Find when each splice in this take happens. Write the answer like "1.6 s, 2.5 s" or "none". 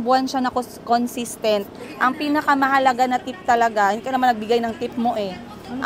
none